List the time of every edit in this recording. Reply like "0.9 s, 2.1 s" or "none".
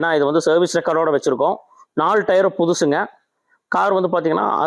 none